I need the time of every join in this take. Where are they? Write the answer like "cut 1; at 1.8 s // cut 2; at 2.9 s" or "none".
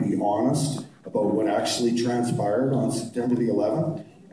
cut 1; at 1.0 s